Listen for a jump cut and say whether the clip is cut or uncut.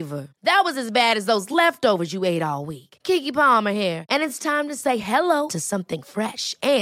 uncut